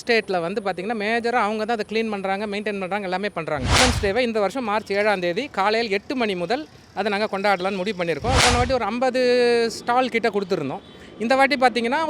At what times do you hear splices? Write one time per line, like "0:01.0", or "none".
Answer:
0:03.8
0:08.4